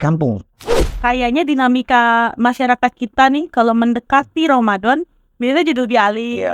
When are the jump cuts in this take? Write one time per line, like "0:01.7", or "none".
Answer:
0:01.0